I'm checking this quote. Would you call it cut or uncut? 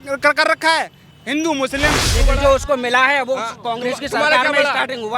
cut